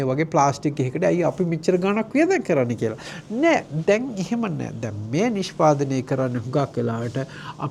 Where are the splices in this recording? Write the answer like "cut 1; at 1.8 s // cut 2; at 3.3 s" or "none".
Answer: none

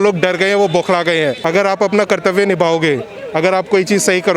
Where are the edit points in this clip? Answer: cut 1; at 1.4 s

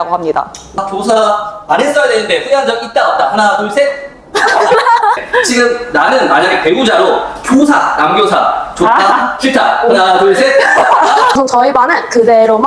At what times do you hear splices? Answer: cut 1; at 0.8 s // cut 2; at 5.2 s // cut 3; at 11.4 s

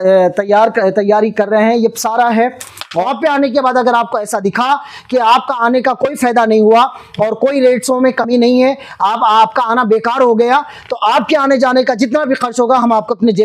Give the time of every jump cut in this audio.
cut 1; at 3.0 s

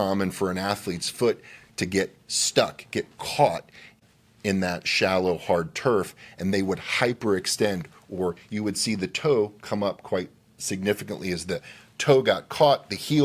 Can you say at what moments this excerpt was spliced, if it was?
cut 1; at 4.0 s

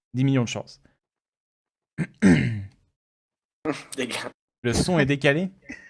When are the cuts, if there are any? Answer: cut 1; at 1.3 s

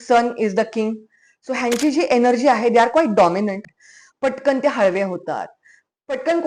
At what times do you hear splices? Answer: cut 1; at 3.7 s

